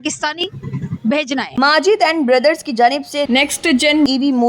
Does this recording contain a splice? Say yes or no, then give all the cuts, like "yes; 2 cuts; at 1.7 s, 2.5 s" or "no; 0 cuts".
yes; 1 cut; at 1.5 s